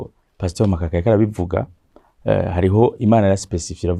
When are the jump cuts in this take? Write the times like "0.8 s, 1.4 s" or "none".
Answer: none